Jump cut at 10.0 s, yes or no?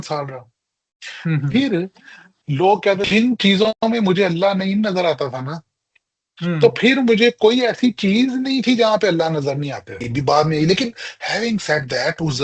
yes